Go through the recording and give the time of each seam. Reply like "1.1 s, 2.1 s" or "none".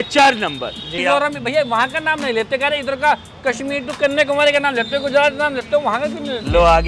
0.9 s